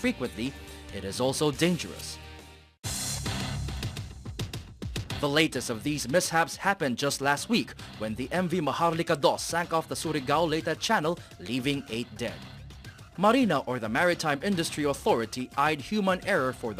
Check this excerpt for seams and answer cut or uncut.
cut